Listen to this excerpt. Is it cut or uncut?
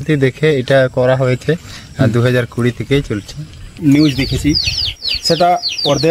cut